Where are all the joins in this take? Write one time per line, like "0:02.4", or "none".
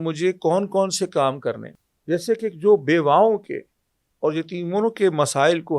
0:01.7